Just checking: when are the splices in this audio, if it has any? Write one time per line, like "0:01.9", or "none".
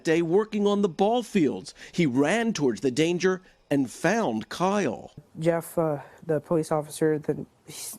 0:05.3